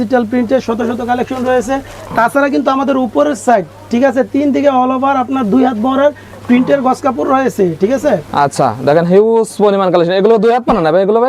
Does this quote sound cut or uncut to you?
uncut